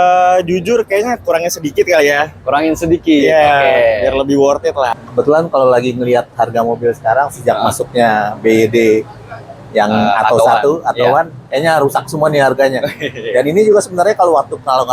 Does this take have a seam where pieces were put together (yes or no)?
yes